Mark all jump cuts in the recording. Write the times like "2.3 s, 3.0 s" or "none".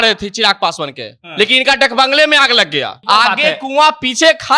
2.9 s